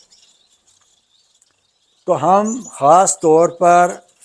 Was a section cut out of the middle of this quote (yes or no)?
no